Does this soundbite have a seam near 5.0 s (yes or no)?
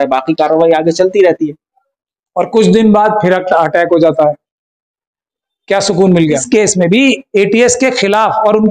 no